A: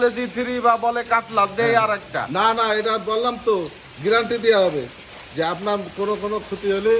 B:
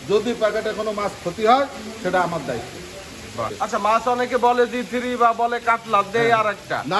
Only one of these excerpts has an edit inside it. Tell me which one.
B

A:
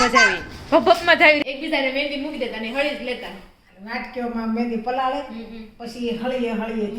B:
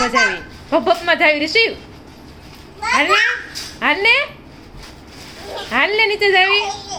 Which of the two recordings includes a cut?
A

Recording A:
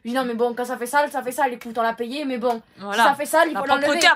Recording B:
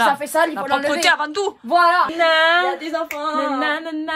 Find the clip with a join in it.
B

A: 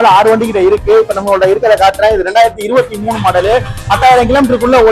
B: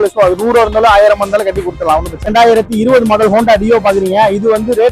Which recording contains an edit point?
B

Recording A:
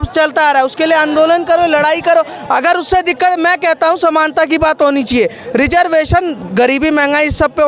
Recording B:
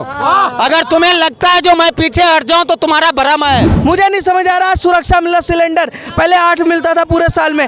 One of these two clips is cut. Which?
B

